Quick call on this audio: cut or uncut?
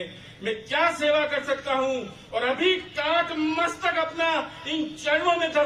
uncut